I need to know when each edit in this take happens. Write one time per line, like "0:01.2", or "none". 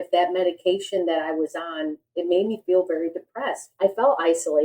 0:02.0
0:03.7